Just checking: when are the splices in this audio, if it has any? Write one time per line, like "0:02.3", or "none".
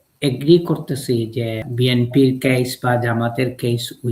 0:01.6